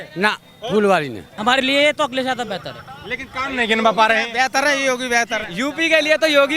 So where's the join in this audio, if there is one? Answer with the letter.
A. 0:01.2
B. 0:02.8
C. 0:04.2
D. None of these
A